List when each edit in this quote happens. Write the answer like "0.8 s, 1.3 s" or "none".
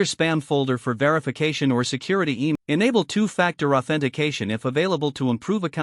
2.5 s